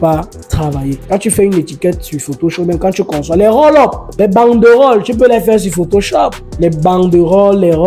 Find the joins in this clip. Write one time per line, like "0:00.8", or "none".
0:01.0
0:04.0
0:06.4